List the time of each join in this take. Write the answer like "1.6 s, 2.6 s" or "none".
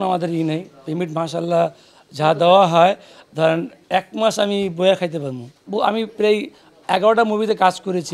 5.5 s